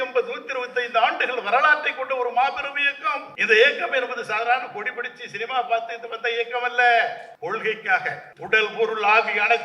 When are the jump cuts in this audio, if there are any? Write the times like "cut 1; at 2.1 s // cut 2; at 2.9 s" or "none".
cut 1; at 3.3 s // cut 2; at 7.3 s // cut 3; at 8.3 s